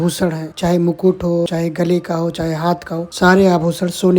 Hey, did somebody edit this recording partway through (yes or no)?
no